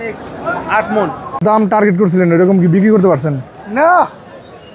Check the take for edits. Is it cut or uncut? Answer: cut